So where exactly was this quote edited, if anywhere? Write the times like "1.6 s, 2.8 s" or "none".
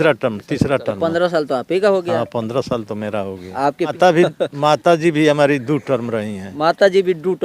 3.9 s